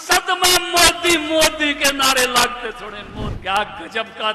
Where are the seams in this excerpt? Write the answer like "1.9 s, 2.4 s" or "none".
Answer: 3.3 s